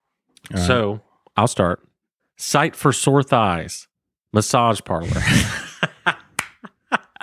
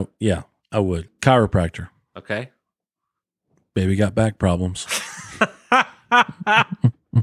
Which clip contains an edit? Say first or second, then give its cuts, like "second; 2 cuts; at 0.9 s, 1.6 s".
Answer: second; 1 cut; at 1.0 s